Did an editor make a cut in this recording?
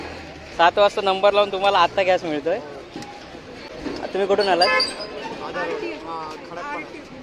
no; 0 cuts

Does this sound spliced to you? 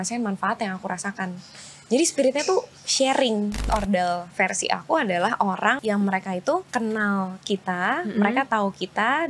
yes; 3 cuts; at 3.7 s, 5.8 s, 6.7 s

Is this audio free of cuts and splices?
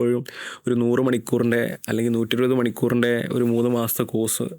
yes; 0 cuts

